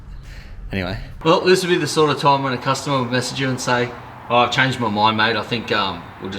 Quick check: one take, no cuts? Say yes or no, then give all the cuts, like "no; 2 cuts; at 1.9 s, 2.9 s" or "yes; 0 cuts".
no; 1 cut; at 1.2 s